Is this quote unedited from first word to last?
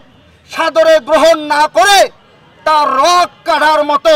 yes; 0 cuts

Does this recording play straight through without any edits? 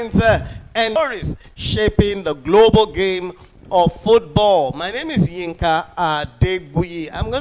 no; 1 cut; at 0.9 s

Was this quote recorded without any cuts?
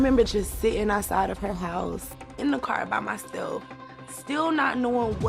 no; 1 cut; at 2.2 s

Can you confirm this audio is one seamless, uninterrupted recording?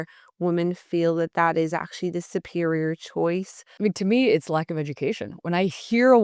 no; 1 cut; at 3.6 s

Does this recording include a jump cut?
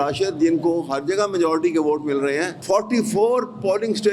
yes; 1 cut; at 2.6 s

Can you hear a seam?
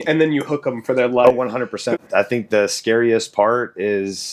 yes; 1 cut; at 2.0 s

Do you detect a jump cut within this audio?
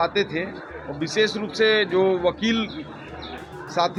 no; 0 cuts

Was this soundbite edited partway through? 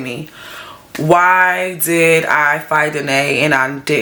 no; 0 cuts

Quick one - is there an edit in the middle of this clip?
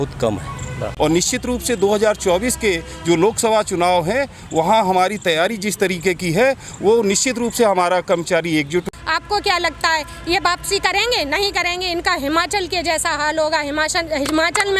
yes; 2 cuts; at 0.9 s, 8.8 s

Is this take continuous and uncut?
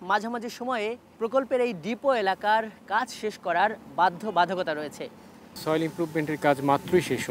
no; 2 cuts; at 1.1 s, 5.6 s

